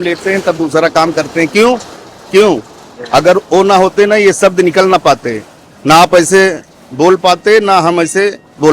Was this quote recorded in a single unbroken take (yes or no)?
yes